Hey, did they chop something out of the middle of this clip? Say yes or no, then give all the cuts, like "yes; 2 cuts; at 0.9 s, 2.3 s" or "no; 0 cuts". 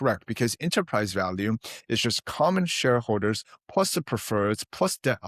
no; 0 cuts